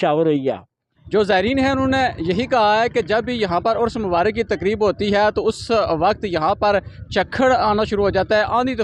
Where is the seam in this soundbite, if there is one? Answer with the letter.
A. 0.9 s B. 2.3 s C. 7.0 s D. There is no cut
A